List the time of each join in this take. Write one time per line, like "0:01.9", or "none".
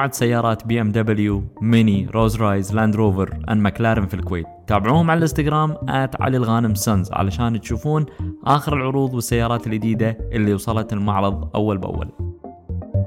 0:12.1